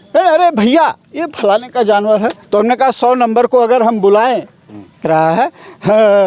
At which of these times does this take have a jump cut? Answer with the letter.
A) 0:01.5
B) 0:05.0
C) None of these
B